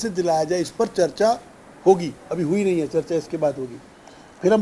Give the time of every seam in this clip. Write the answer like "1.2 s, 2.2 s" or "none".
none